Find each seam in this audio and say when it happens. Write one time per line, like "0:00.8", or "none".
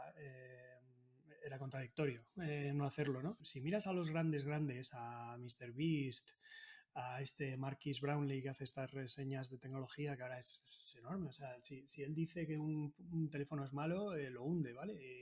0:03.5